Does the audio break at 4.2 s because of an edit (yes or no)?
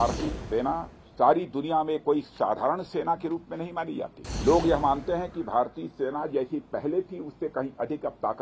yes